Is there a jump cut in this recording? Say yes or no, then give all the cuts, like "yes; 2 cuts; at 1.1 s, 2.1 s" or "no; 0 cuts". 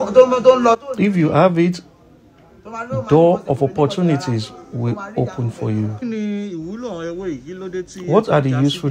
yes; 1 cut; at 6.0 s